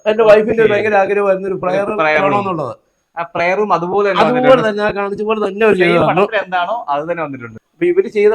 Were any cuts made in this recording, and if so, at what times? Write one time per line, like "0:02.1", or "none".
0:07.4